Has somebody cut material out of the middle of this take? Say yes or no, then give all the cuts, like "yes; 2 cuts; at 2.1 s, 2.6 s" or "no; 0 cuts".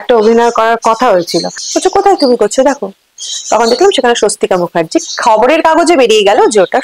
yes; 1 cut; at 1.6 s